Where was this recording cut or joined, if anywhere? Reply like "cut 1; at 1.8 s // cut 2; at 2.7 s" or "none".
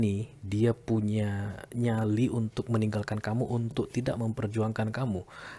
none